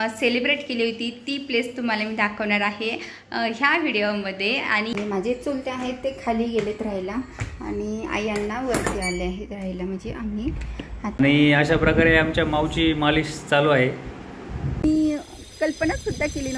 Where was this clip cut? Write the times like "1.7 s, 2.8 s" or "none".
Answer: 4.9 s, 11.2 s, 14.8 s